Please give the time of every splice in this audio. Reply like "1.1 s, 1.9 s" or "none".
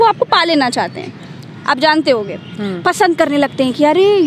none